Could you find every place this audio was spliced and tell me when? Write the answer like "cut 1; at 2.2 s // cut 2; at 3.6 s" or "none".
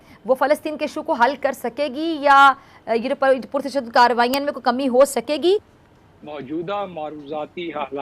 cut 1; at 5.6 s

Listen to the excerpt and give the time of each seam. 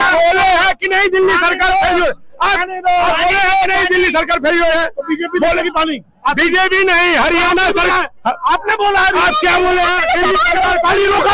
none

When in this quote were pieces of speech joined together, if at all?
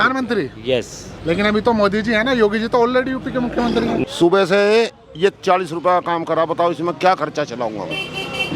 cut 1; at 4.0 s

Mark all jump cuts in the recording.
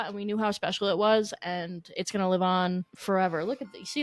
cut 1; at 2.9 s

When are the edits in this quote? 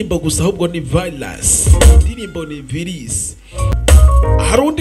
cut 1; at 3.8 s

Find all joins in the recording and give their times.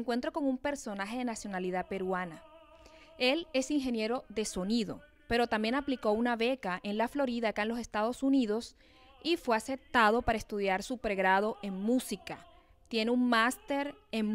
cut 1; at 8.7 s

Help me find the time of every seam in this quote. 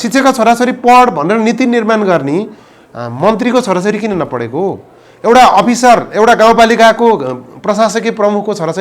none

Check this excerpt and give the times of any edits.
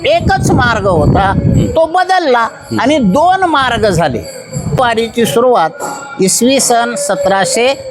cut 1; at 4.8 s

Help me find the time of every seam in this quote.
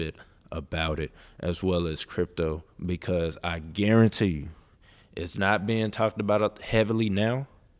none

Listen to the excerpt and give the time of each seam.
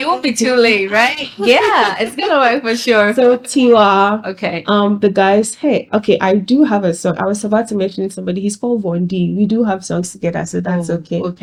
none

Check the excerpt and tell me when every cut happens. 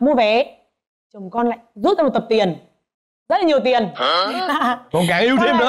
none

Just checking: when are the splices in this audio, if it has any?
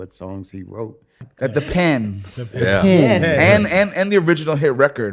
cut 1; at 1.2 s

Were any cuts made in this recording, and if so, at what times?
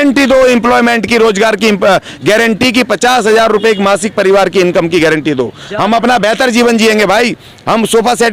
none

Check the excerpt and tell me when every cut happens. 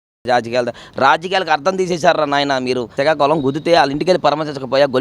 cut 1; at 2.9 s

